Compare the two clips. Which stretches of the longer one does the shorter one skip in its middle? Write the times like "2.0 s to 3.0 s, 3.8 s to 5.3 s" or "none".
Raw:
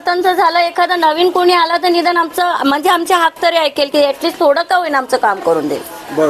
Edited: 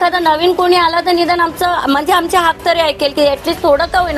none

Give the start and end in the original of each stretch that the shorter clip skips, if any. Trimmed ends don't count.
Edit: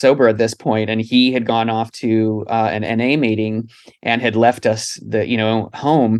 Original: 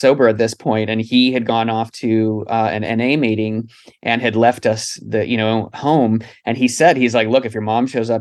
none

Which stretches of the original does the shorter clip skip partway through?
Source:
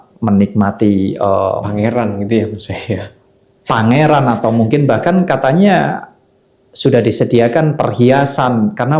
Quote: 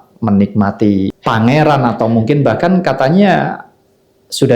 1.1 s to 3.6 s

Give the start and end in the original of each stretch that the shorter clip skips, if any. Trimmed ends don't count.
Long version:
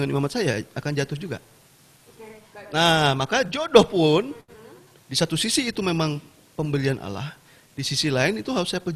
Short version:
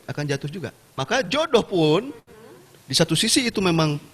1.6 s to 3.2 s

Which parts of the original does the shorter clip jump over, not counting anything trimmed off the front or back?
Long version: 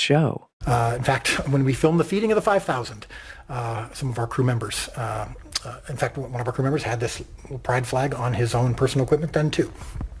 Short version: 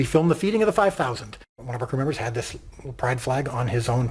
3.3 s to 6.3 s

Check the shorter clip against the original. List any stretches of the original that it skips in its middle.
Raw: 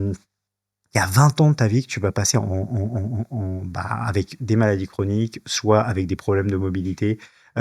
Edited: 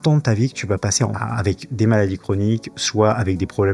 2.5 s to 3.8 s

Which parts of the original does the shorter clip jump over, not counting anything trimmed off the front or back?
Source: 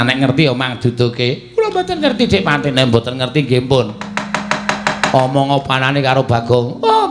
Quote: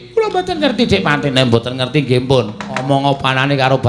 4.2 s to 5.3 s

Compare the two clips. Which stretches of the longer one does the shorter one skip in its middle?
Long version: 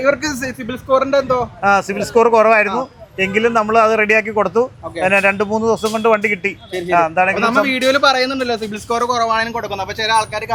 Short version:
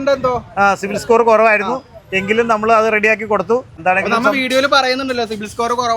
4.9 s to 7.1 s

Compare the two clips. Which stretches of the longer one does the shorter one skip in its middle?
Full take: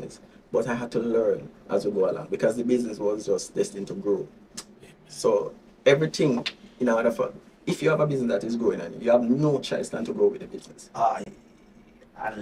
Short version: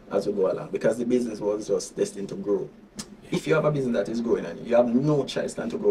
4.7 s to 7.5 s

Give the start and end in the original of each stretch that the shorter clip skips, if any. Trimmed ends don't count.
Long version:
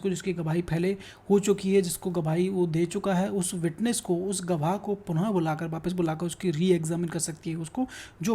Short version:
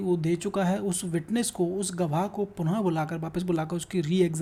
none

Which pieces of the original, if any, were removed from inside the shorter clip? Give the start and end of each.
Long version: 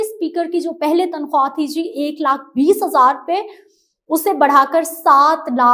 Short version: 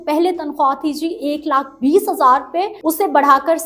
3.5 s to 4.0 s

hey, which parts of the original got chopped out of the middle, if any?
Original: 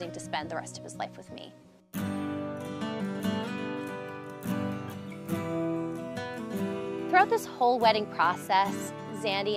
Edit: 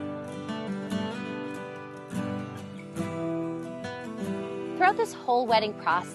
none

